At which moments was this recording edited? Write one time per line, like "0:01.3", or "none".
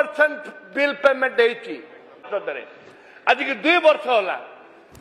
0:02.3